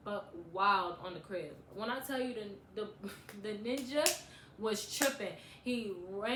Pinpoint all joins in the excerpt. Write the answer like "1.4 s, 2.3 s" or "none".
none